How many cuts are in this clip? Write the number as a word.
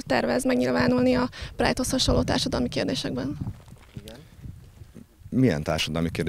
zero